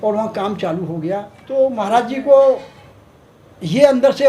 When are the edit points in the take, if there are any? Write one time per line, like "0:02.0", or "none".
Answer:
0:01.3